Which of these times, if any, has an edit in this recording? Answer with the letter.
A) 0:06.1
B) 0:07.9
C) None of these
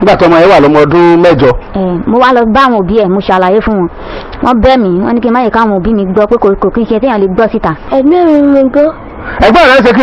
B